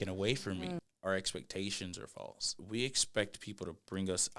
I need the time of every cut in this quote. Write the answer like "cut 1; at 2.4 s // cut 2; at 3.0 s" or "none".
cut 1; at 0.8 s // cut 2; at 2.5 s